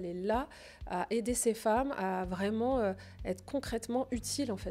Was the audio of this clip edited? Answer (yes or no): no